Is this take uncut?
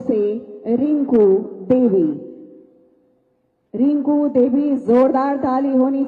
yes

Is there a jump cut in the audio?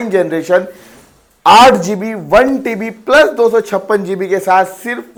no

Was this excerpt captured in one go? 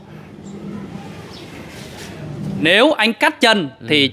no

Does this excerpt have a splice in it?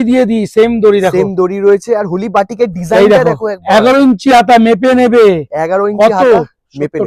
no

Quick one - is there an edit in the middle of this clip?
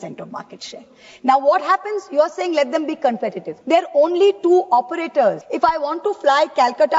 yes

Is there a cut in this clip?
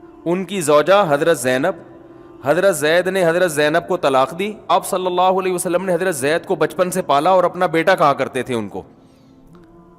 yes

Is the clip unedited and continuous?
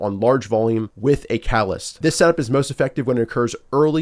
no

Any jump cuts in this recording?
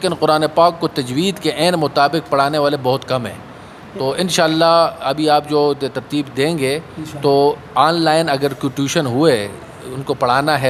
no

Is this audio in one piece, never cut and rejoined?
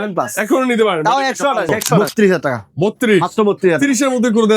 no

